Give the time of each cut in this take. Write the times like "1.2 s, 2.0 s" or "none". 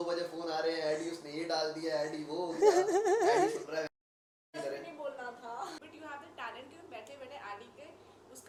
none